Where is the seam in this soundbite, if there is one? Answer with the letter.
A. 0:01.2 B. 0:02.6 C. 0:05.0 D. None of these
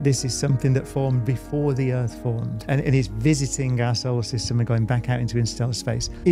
B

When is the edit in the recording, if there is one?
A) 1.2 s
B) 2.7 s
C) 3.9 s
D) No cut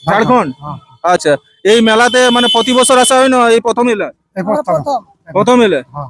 A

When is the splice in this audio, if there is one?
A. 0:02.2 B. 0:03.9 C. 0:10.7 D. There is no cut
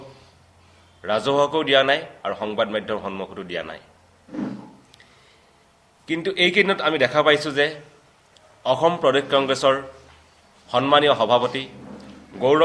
D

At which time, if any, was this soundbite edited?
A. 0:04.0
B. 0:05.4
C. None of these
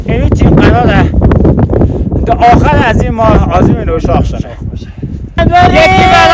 B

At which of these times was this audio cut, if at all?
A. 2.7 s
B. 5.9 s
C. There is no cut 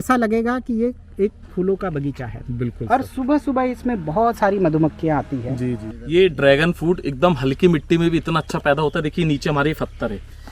B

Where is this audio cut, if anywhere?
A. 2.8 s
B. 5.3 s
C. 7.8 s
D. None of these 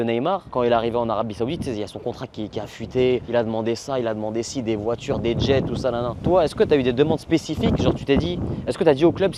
D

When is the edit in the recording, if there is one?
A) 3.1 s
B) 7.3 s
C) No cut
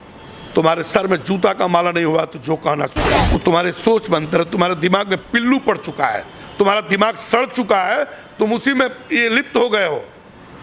A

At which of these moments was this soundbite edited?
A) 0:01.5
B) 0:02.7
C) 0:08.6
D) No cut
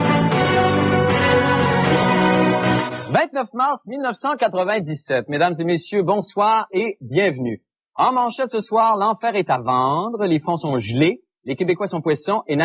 C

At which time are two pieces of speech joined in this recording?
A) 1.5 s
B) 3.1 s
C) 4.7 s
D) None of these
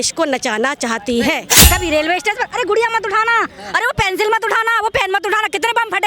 A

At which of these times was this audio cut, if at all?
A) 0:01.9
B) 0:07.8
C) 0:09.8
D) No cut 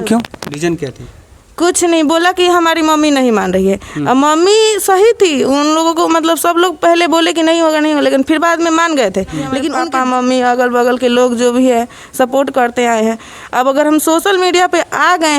C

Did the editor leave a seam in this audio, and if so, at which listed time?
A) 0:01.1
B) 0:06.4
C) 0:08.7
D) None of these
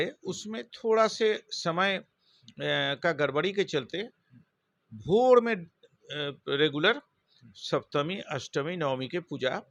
D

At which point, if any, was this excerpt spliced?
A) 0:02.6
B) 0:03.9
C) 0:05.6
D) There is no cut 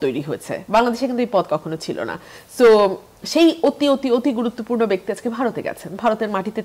D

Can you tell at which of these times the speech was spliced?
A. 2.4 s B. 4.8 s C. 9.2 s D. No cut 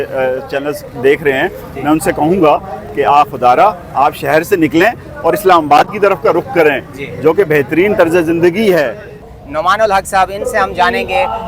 C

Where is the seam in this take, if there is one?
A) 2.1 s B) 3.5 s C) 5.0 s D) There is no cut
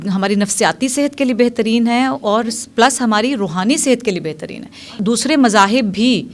C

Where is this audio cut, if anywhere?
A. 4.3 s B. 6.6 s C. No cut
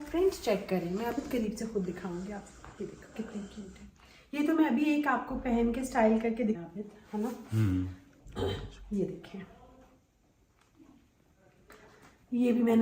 B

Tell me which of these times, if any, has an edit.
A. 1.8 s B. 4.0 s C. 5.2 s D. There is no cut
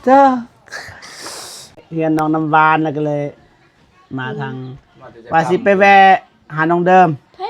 A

